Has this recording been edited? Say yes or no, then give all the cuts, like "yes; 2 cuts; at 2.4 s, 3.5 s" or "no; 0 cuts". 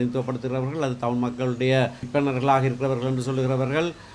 yes; 1 cut; at 2.1 s